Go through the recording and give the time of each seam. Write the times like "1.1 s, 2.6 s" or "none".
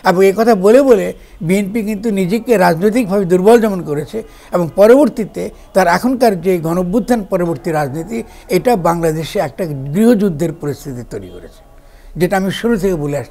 none

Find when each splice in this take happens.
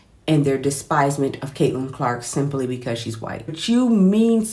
3.6 s

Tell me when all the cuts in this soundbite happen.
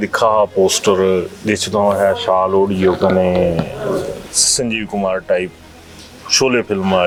none

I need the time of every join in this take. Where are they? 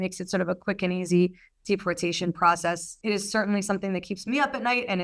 2.9 s

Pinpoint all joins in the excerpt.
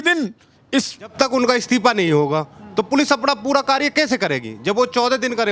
1.1 s

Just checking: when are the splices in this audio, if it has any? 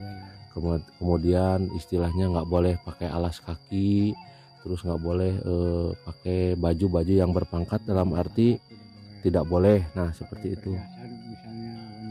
none

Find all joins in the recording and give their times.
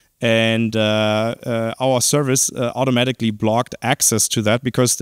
none

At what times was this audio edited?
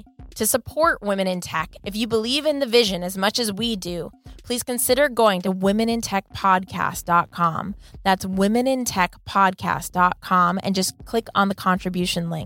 none

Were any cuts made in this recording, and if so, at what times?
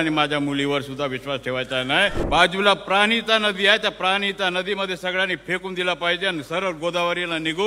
2.2 s

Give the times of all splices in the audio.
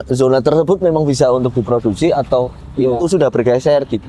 none

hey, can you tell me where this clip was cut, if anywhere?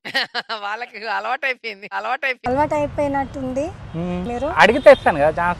4.3 s

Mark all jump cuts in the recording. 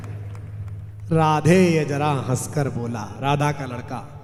none

